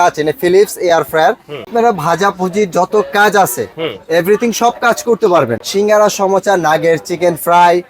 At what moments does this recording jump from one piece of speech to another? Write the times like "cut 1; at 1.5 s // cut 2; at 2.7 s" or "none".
cut 1; at 1.7 s // cut 2; at 5.6 s

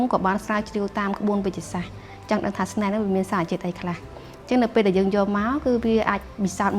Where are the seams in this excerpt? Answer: none

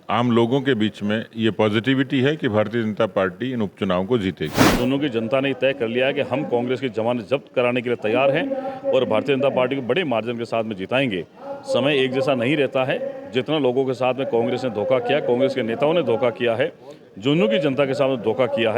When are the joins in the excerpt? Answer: cut 1; at 4.8 s

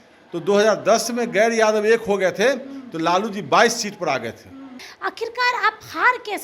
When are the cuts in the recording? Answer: cut 1; at 4.8 s

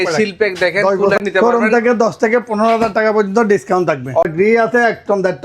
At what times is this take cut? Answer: cut 1; at 1.2 s // cut 2; at 4.2 s

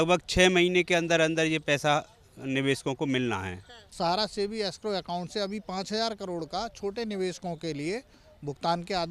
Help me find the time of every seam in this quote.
cut 1; at 3.9 s

